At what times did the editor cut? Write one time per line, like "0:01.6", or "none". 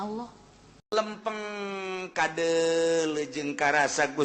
0:00.9